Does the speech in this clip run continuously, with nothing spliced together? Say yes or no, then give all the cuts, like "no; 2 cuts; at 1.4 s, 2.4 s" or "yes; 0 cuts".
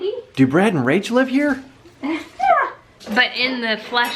no; 1 cut; at 2.8 s